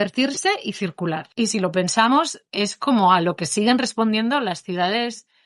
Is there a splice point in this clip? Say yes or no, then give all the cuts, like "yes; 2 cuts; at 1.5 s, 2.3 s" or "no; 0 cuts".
yes; 1 cut; at 1.3 s